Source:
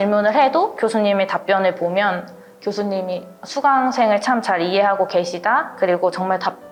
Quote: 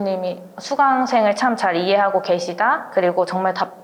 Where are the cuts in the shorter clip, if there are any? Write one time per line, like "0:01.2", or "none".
none